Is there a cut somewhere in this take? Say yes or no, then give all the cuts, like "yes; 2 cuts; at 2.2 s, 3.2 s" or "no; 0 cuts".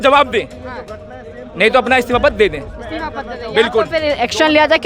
no; 0 cuts